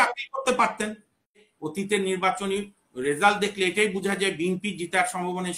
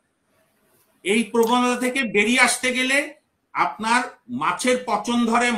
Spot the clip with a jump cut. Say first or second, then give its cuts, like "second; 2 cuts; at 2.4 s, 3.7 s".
first; 1 cut; at 1.3 s